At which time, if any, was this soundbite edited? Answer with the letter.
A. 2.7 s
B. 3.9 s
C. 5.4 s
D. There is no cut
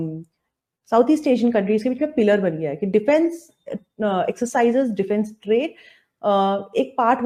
D